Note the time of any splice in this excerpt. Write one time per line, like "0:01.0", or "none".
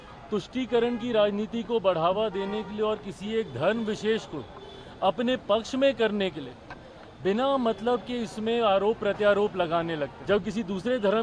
0:10.1